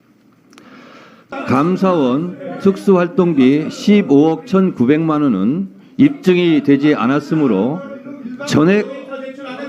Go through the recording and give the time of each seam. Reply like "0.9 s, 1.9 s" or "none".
1.3 s